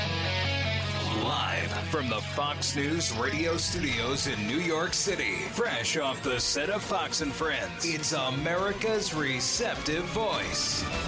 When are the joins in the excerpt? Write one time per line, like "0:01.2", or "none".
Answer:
0:01.0